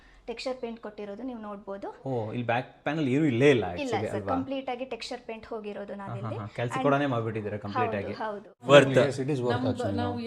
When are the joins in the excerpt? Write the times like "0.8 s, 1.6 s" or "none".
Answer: 8.6 s

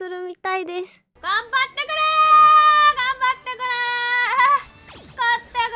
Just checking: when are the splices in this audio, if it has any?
1.0 s

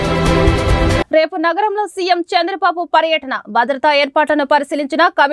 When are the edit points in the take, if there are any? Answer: 1.0 s

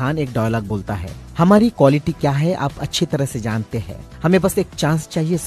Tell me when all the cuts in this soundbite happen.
none

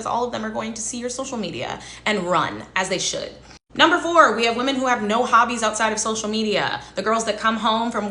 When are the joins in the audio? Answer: 2.2 s

